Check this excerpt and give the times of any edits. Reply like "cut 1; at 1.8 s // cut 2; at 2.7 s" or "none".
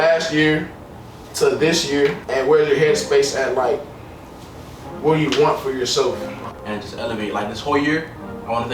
cut 1; at 2.2 s // cut 2; at 6.4 s